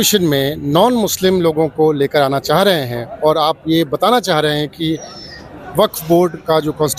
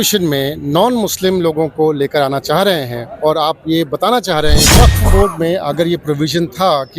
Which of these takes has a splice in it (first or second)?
second